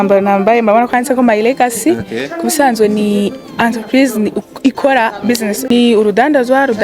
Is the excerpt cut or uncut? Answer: cut